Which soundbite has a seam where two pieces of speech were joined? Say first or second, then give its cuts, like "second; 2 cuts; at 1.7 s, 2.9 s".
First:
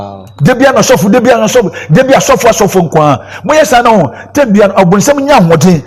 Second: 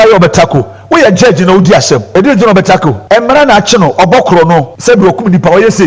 second; 3 cuts; at 2.1 s, 3.0 s, 4.7 s